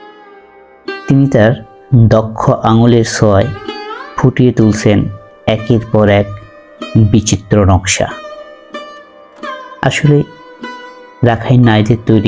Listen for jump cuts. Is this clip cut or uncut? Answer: cut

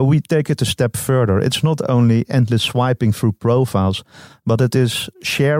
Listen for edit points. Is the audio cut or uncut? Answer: uncut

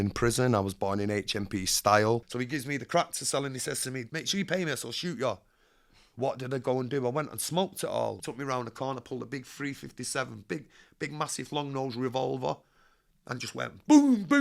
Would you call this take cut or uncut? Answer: cut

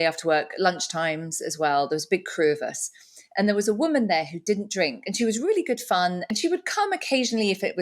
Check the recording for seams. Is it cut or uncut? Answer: cut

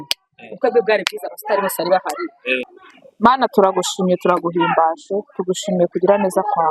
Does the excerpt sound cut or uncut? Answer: cut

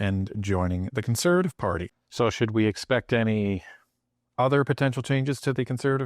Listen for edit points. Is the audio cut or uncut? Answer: cut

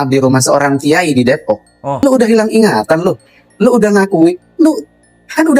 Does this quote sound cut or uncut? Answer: cut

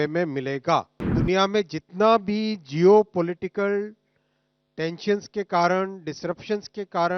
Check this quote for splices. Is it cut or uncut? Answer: cut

